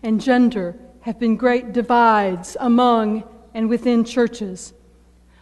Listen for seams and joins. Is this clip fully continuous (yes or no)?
yes